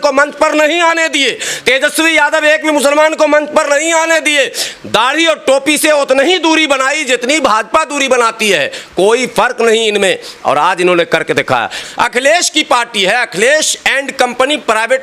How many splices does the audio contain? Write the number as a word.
one